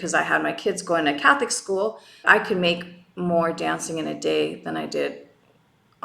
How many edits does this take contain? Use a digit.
1